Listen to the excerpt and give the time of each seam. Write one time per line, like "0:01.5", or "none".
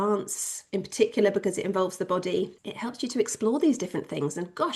0:02.6